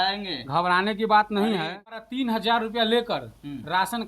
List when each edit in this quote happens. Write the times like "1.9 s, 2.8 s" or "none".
2.1 s